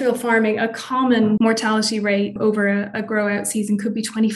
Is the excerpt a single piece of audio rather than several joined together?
no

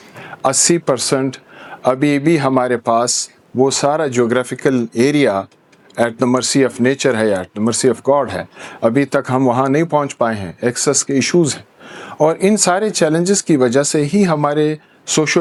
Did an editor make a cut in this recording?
no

